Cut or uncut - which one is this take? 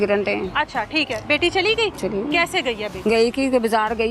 cut